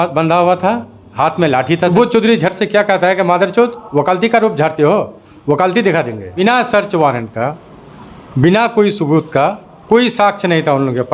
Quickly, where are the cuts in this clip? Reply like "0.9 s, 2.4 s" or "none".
1.9 s, 6.4 s